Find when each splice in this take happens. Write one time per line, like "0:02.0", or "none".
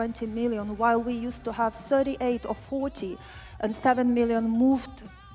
none